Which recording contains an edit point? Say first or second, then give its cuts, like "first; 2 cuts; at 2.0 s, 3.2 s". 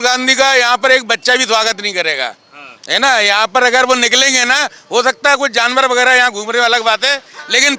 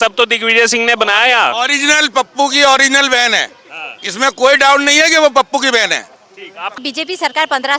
second; 1 cut; at 6.7 s